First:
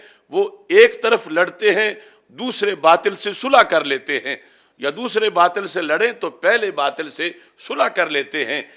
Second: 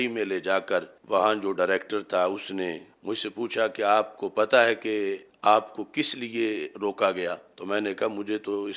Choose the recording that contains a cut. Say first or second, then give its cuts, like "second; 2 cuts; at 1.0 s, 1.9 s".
second; 4 cuts; at 1.0 s, 2.9 s, 5.3 s, 7.5 s